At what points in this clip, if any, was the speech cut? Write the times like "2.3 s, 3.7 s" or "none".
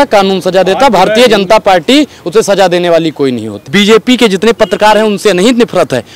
3.6 s

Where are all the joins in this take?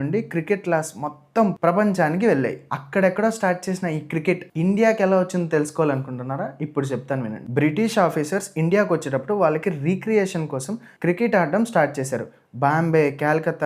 2.7 s, 7.4 s

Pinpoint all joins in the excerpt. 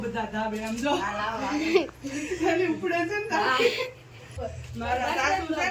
4.2 s

